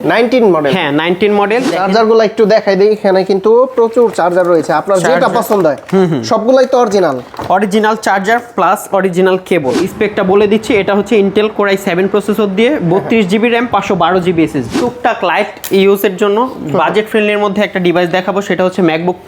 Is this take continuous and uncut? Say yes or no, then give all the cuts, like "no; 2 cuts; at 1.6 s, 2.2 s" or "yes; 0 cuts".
no; 3 cuts; at 1.8 s, 9.9 s, 14.8 s